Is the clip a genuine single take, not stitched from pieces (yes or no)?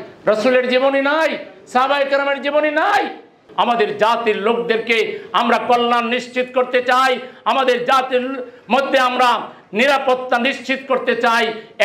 no